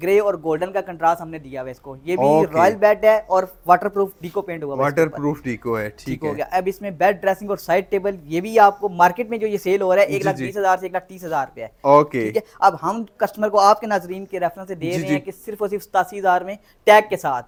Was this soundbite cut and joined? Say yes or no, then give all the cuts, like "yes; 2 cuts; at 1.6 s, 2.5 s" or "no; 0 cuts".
no; 0 cuts